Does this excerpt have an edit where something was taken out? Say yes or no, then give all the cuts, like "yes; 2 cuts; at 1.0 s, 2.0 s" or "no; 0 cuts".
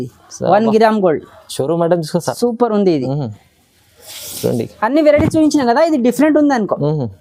no; 0 cuts